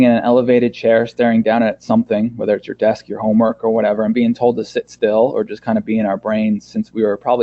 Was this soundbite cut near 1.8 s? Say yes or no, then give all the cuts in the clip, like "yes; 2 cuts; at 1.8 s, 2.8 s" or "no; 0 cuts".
no; 0 cuts